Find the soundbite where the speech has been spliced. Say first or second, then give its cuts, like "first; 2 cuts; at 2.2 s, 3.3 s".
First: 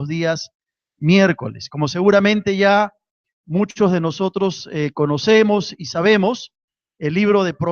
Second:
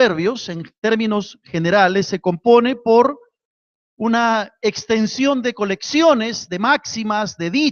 first; 1 cut; at 3.7 s